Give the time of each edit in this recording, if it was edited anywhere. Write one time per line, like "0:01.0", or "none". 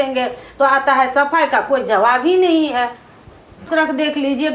0:03.7